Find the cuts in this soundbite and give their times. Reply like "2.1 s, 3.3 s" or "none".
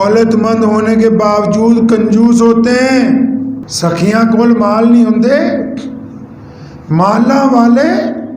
3.6 s